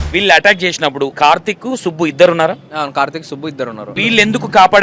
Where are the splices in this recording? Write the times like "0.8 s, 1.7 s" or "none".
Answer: 1.1 s, 4.0 s